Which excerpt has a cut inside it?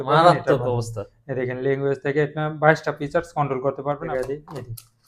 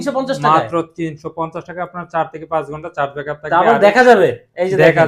first; 1 cut; at 4.0 s

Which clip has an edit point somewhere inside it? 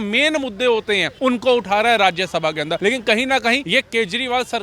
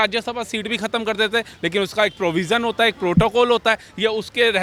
first; 3 cuts; at 1.1 s, 2.8 s, 3.6 s

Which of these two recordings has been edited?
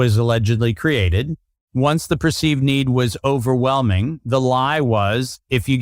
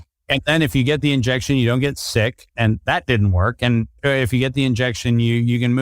second; 1 cut; at 3.9 s

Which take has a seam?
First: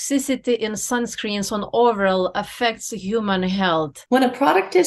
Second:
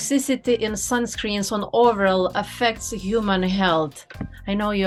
first; 1 cut; at 4.0 s

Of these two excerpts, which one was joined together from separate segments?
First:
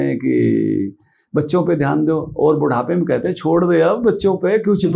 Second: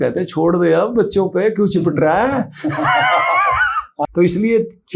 second; 1 cut; at 3.9 s

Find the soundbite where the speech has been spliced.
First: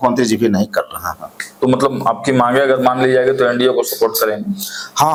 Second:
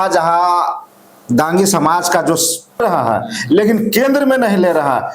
second; 1 cut; at 2.8 s

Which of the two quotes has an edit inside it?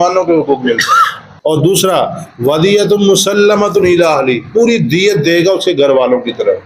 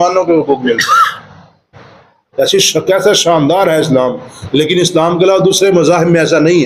first; 1 cut; at 1.2 s

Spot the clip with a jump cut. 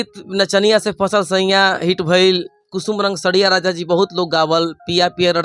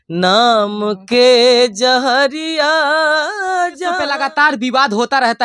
second; 1 cut; at 4.0 s

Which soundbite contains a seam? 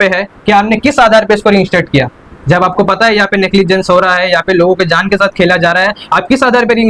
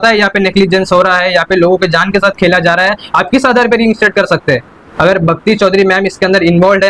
second; 1 cut; at 4.8 s

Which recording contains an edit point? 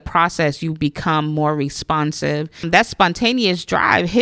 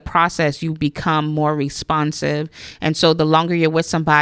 first; 1 cut; at 2.7 s

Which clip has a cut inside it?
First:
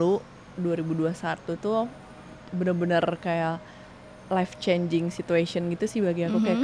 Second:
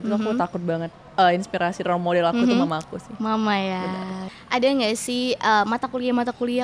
second; 2 cuts; at 1.0 s, 4.3 s

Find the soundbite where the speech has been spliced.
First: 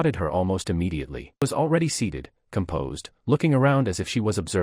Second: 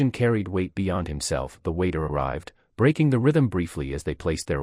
first; 1 cut; at 1.4 s

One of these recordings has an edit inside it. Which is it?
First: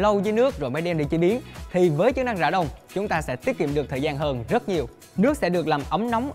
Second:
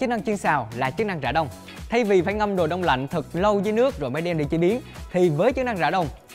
first; 1 cut; at 5.0 s

